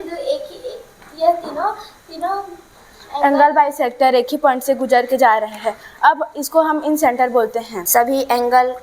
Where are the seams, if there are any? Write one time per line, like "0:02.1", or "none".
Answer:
0:07.8